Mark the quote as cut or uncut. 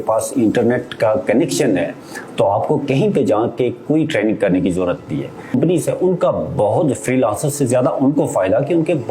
cut